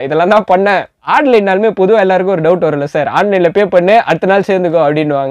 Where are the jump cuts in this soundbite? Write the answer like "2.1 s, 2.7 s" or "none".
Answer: 1.0 s